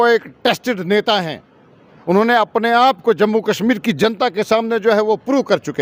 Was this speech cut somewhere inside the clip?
no; 0 cuts

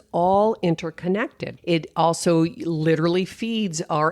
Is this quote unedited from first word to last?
no; 1 cut; at 1.5 s

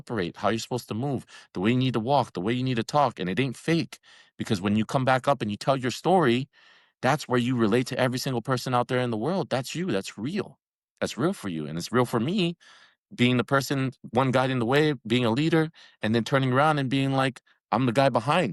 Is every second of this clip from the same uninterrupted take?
yes; 0 cuts

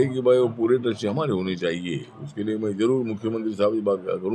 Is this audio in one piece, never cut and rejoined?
yes; 0 cuts

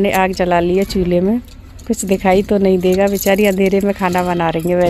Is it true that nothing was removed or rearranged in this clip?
yes; 0 cuts

